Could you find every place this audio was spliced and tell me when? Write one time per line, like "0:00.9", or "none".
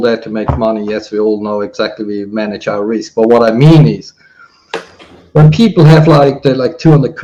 none

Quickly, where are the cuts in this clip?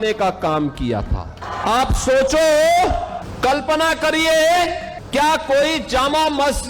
0:01.4
0:03.2
0:04.9

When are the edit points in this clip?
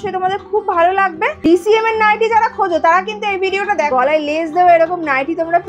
0:01.4
0:03.9

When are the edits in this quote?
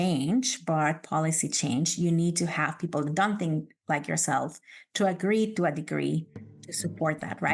0:06.5

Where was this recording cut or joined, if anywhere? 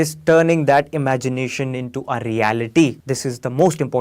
0:03.0

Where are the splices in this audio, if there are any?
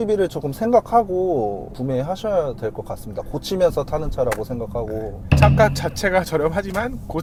none

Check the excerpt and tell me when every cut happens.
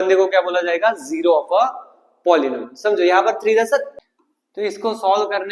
0:04.0

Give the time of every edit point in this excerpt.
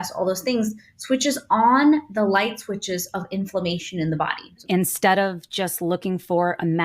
0:04.6

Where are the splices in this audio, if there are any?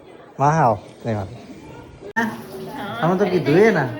0:02.0

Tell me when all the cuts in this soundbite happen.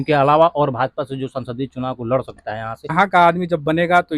0:02.9

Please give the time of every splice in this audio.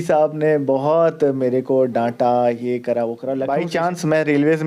0:03.4

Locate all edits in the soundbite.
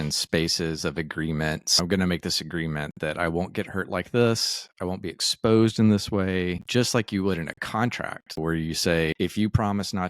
0:01.8
0:06.6
0:08.4
0:09.1

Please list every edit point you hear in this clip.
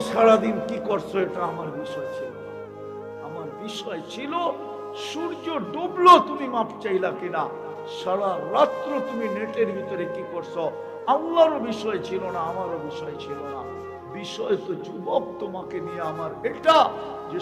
none

